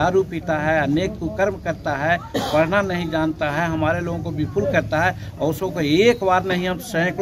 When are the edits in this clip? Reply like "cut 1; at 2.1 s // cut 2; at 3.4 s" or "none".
none